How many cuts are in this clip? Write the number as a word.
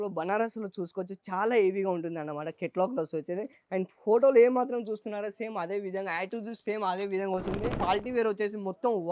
one